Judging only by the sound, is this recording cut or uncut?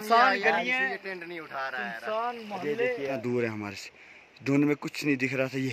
cut